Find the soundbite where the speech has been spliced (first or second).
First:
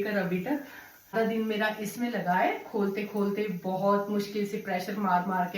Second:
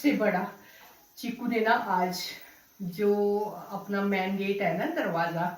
first